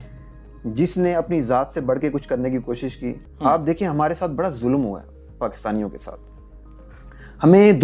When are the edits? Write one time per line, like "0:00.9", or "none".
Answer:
0:03.2